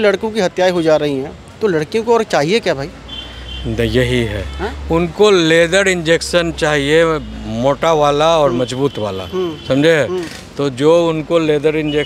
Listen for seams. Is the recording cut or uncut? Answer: uncut